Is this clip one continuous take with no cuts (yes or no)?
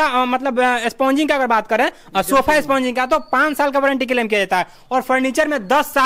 yes